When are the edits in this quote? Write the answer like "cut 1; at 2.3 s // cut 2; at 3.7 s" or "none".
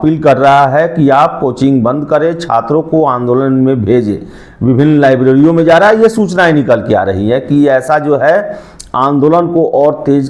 none